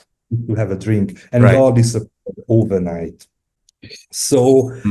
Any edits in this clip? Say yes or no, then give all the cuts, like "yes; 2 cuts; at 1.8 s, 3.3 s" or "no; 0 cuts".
no; 0 cuts